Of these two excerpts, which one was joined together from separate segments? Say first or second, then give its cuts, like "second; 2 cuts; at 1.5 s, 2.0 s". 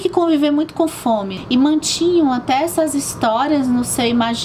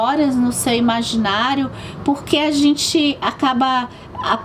first; 1 cut; at 1.3 s